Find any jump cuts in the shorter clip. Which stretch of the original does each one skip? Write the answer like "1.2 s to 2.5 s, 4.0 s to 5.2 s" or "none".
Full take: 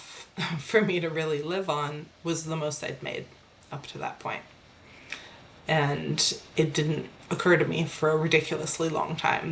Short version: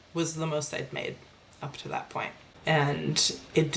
4.6 s to 5.5 s